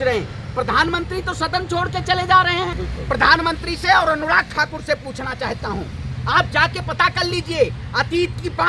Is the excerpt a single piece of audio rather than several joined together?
no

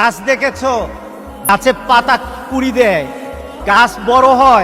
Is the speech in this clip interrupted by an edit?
yes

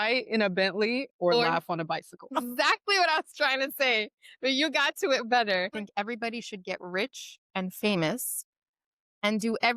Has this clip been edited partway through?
yes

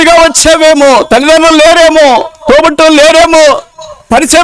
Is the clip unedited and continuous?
yes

